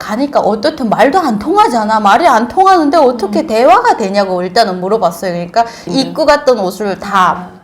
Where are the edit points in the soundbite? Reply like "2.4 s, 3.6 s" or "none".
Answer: 5.8 s

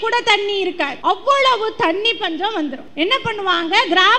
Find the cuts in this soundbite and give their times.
0.9 s, 2.8 s

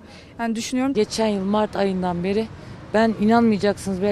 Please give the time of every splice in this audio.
0.9 s

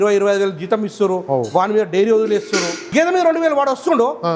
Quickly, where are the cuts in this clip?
2.8 s

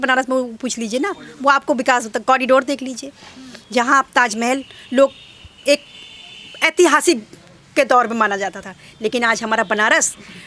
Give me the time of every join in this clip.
none

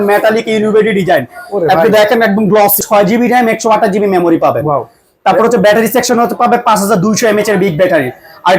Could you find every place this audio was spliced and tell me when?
2.8 s

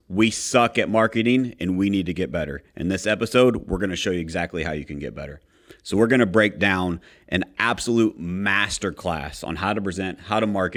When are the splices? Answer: none

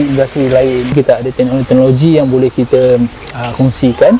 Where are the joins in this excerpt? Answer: 0.9 s

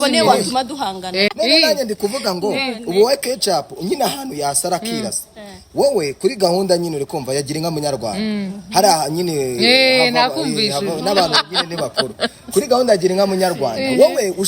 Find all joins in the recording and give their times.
1.3 s

